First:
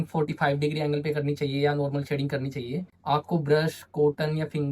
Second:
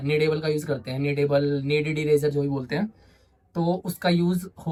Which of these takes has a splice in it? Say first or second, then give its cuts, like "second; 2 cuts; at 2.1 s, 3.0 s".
first; 1 cut; at 2.9 s